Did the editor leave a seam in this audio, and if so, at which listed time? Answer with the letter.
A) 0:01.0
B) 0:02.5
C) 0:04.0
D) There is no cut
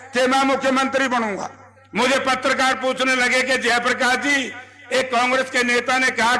D